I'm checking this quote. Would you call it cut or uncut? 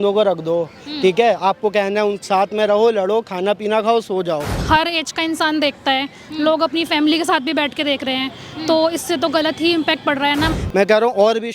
cut